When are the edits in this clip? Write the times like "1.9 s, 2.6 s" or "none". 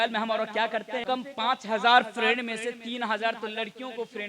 1.0 s